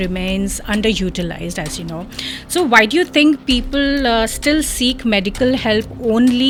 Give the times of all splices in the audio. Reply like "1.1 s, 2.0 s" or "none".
none